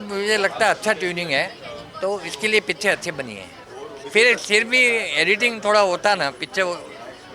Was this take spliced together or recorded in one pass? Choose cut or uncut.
uncut